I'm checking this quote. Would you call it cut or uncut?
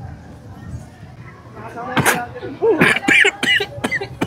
cut